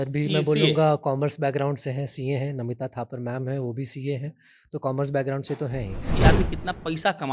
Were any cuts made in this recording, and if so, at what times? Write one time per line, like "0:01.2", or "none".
0:06.1